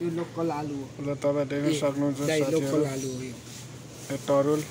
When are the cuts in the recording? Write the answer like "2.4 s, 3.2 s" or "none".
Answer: none